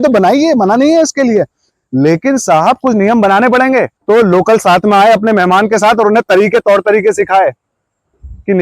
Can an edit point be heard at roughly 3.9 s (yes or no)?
yes